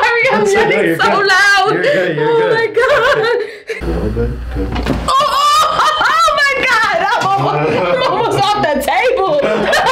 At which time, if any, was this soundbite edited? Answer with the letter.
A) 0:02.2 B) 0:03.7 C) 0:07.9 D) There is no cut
B